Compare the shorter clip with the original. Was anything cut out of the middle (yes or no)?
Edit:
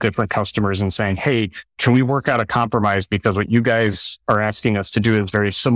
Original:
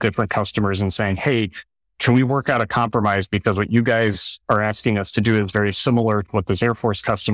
yes